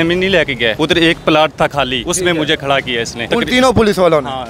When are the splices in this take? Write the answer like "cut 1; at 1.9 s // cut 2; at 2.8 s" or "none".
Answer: cut 1; at 0.7 s // cut 2; at 2.0 s // cut 3; at 3.2 s

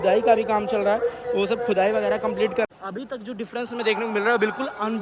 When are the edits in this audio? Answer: cut 1; at 2.7 s

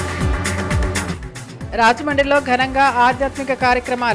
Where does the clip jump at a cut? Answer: cut 1; at 1.1 s

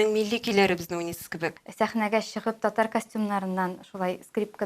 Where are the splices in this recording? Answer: cut 1; at 1.6 s

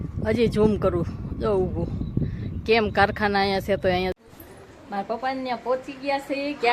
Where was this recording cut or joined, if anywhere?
cut 1; at 4.1 s

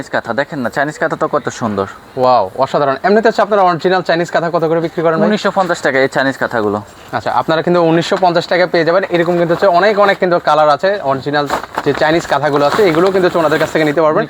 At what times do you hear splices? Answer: none

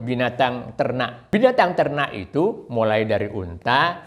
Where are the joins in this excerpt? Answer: cut 1; at 1.2 s

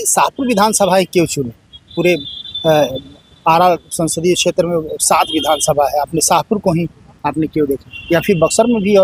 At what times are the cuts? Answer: none

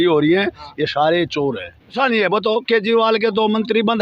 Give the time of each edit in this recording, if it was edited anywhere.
cut 1; at 1.9 s

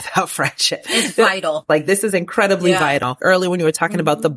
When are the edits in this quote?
cut 1; at 1.6 s // cut 2; at 3.1 s

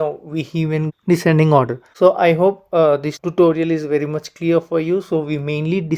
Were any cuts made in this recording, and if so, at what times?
none

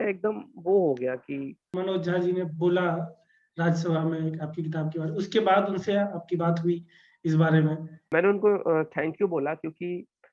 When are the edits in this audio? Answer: cut 1; at 1.7 s // cut 2; at 8.1 s

